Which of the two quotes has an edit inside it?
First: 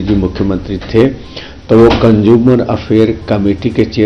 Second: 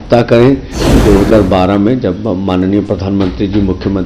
second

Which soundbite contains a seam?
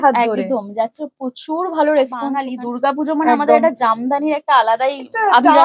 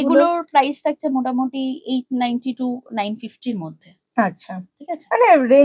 first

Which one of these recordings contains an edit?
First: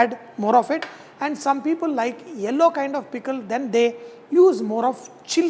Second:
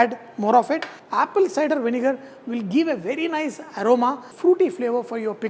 second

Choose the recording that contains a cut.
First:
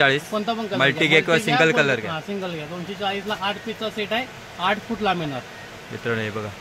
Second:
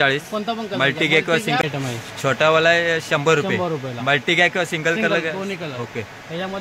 second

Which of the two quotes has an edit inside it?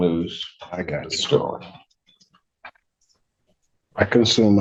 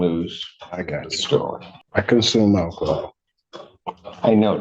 second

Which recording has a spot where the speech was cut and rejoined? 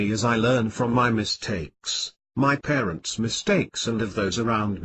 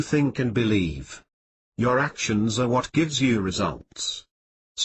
first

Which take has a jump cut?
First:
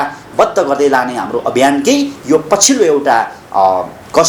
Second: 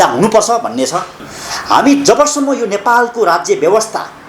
second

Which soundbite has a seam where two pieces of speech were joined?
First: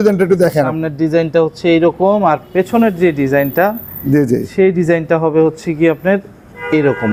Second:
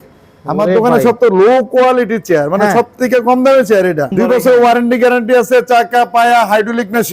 second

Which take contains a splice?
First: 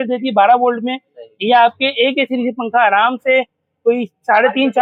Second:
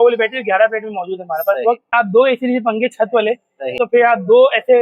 second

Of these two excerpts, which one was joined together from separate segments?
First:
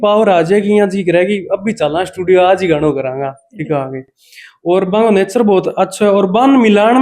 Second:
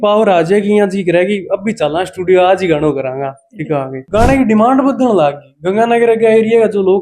second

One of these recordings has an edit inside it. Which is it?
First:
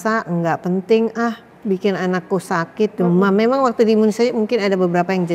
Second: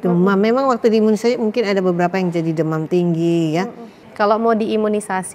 second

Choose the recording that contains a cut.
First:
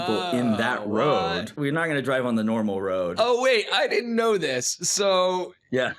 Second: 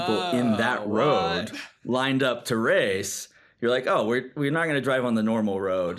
first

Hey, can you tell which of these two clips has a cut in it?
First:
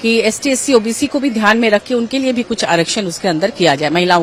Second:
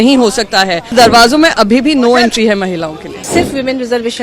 second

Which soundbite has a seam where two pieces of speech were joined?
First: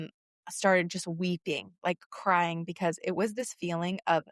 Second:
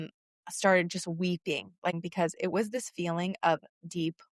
second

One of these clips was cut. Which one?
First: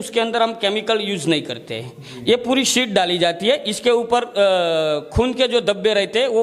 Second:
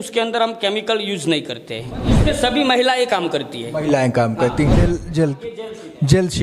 second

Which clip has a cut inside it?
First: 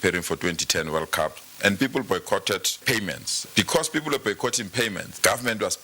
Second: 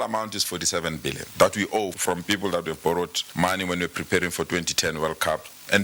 first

